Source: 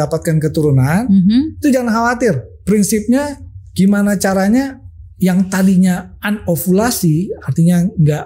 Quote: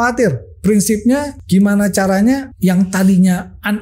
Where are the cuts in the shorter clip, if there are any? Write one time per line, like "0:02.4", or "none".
0:01.3
0:02.5